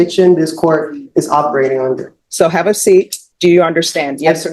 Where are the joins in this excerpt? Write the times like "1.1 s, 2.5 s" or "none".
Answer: 2.2 s, 3.2 s